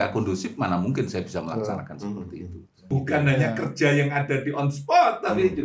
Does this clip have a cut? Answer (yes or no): yes